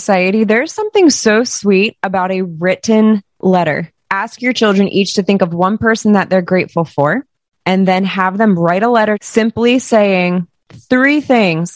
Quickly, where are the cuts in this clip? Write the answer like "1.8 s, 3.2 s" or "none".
4.0 s, 9.2 s